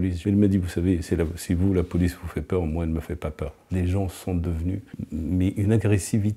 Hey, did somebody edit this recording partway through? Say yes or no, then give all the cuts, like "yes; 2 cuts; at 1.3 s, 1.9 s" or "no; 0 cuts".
yes; 2 cuts; at 3.6 s, 4.9 s